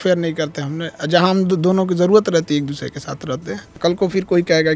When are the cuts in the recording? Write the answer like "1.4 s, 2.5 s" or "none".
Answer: 3.6 s